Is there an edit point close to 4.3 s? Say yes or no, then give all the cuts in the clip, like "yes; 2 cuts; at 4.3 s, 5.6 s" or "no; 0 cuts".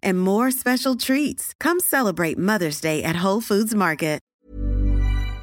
yes; 1 cut; at 4.3 s